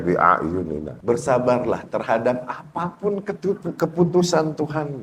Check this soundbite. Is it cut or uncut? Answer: cut